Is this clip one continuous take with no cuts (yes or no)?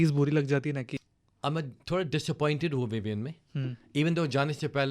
no